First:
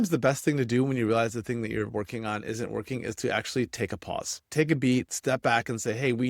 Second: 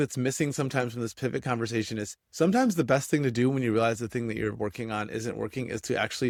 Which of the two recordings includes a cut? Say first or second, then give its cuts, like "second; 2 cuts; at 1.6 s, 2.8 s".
first; 1 cut; at 5.1 s